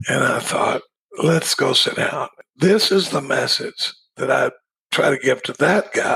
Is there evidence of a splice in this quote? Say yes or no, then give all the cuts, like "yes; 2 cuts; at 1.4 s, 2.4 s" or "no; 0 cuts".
yes; 2 cuts; at 1.0 s, 2.3 s